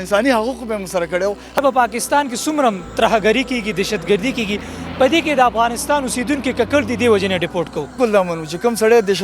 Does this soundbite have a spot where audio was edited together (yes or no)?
yes